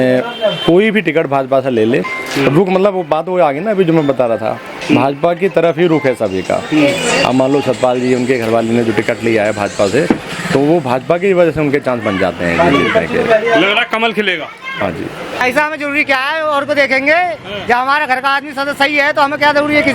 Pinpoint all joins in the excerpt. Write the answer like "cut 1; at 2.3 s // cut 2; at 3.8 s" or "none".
cut 1; at 15.4 s